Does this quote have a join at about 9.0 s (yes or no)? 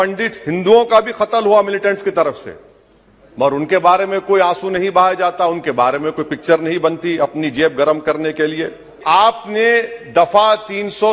yes